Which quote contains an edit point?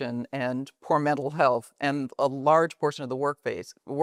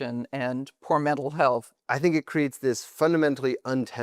second; 1 cut; at 1.7 s

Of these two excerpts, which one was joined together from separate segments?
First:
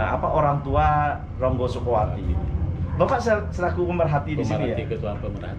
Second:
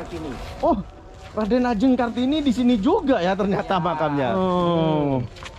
second; 1 cut; at 4.1 s

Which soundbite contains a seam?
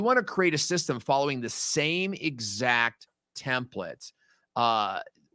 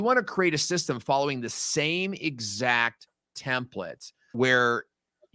second; 1 cut; at 4.1 s

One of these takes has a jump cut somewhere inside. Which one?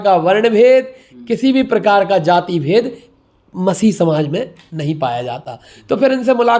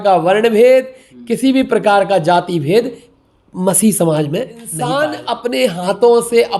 second; 1 cut; at 4.7 s

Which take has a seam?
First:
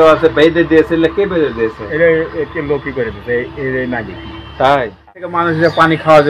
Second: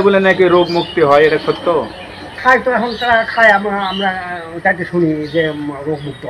first; 1 cut; at 5.4 s

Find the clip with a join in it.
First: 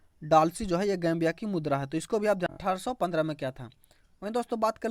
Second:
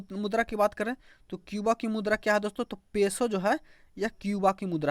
first; 1 cut; at 2.5 s

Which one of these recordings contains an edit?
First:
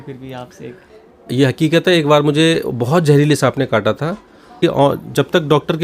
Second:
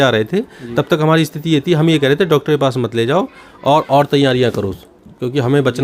first; 1 cut; at 4.6 s

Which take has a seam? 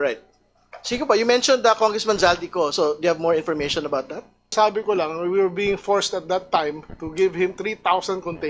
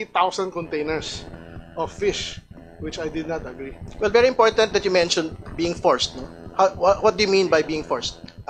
first; 1 cut; at 4.5 s

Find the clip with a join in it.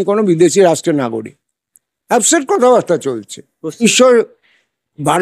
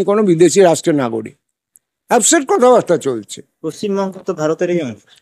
first; 1 cut; at 3.8 s

